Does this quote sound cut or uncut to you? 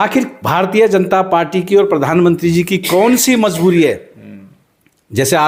uncut